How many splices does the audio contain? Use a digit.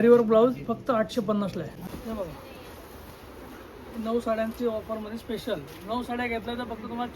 1